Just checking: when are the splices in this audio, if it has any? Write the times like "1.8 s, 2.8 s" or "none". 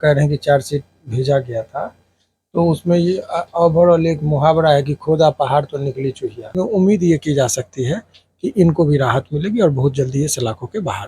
6.6 s